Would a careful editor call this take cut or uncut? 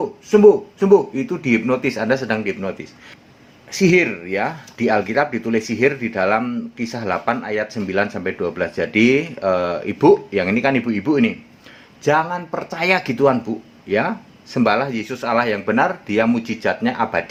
uncut